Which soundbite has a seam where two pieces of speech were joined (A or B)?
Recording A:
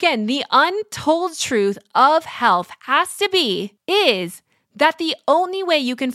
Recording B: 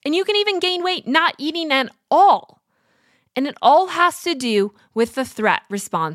A